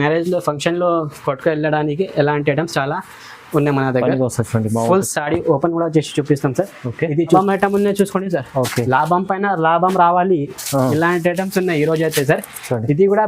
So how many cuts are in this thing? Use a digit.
1